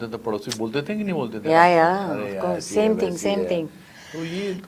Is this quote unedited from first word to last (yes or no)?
yes